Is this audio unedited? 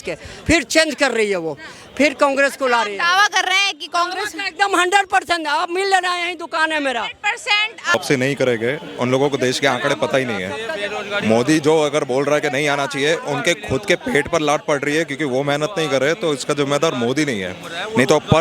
no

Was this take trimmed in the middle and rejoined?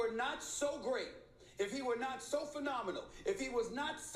no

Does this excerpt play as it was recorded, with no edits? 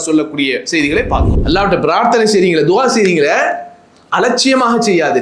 no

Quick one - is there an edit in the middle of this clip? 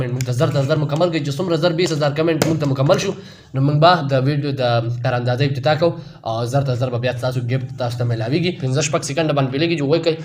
yes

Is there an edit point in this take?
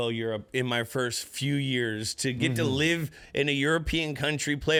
no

